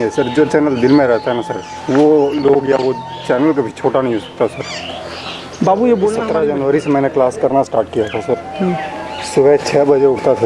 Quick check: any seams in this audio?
yes; 1 cut; at 6.2 s

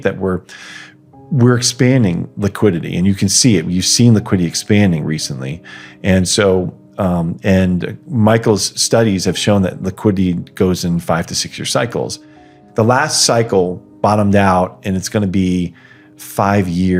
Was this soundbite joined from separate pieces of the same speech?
no; 0 cuts

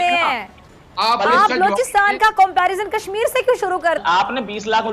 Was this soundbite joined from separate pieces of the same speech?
yes; 1 cut; at 4.0 s

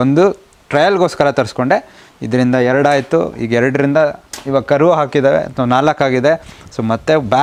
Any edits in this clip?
no; 0 cuts

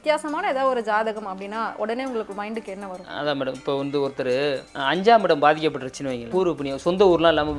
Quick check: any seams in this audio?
yes; 2 cuts; at 4.7 s, 6.2 s

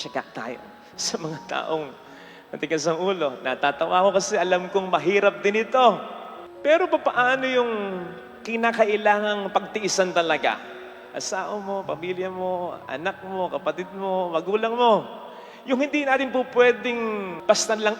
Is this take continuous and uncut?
yes; 0 cuts

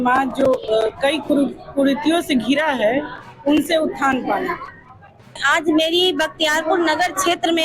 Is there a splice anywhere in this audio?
yes; 1 cut; at 5.3 s

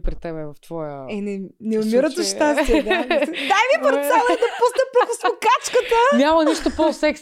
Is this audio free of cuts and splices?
yes; 0 cuts

